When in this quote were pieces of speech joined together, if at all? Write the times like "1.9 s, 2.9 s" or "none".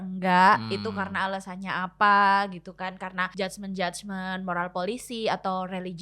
3.3 s